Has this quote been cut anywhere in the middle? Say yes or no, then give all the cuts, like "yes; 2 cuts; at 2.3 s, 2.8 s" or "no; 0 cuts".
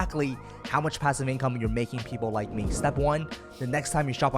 yes; 1 cut; at 3.3 s